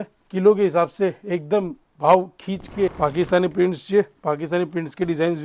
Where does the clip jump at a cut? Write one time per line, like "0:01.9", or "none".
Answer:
0:02.9

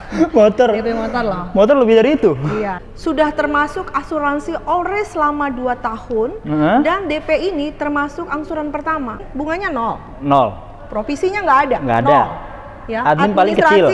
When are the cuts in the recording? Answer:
0:02.8
0:09.2

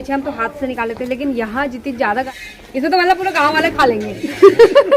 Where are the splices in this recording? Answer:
0:02.3

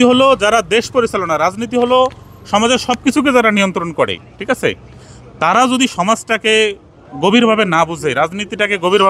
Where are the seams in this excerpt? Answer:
none

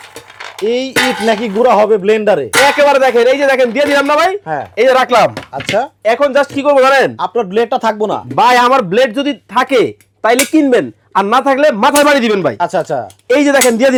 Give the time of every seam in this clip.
none

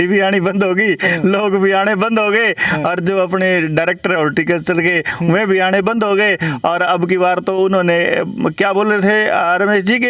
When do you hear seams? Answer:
none

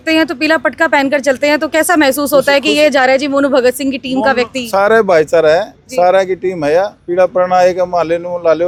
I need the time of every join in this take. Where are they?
none

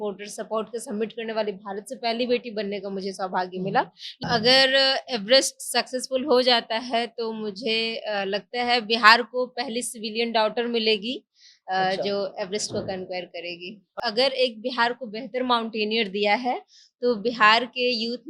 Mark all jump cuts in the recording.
0:04.2
0:13.9

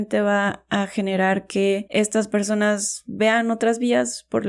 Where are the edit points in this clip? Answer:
none

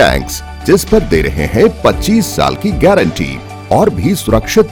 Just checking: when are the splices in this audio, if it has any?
none

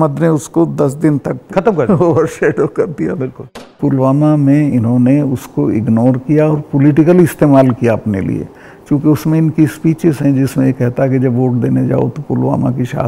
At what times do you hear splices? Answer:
0:03.7

